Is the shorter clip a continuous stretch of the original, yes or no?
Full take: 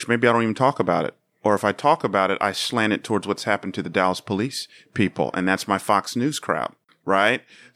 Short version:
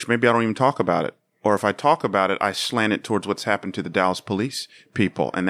yes